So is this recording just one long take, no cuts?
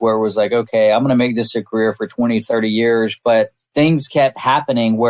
no; 1 cut; at 3.6 s

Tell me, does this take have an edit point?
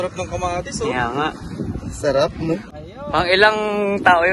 yes; 1 cut; at 2.6 s

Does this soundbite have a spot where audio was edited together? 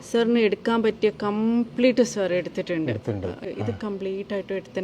yes; 1 cut; at 3.4 s

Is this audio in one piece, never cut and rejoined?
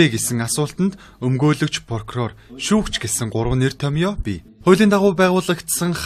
yes; 0 cuts

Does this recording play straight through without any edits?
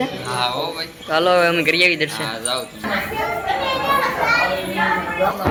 yes; 0 cuts

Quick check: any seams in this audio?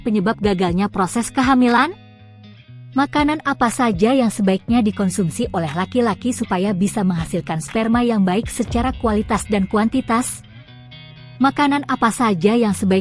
yes; 2 cuts; at 2.3 s, 10.8 s

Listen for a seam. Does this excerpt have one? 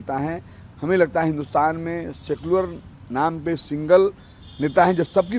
no; 0 cuts

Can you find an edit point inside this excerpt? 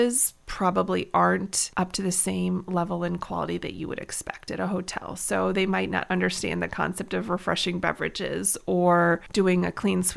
yes; 2 cuts; at 1.6 s, 9.2 s

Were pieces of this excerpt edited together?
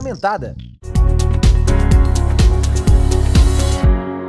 yes; 1 cut; at 1.1 s

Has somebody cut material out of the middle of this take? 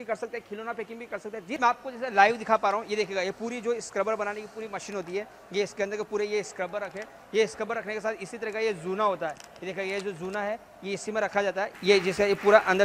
yes; 2 cuts; at 1.6 s, 11.7 s

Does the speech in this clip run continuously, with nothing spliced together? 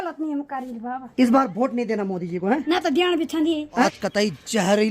no; 3 cuts; at 1.0 s, 2.6 s, 3.8 s

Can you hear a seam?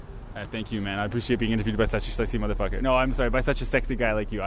no; 0 cuts

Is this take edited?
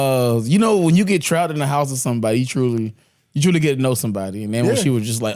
no; 0 cuts

